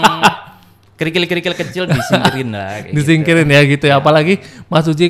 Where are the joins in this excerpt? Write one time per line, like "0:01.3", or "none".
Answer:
none